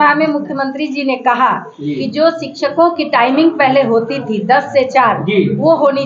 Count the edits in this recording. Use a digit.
0